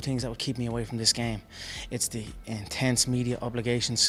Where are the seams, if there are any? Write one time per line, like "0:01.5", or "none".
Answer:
none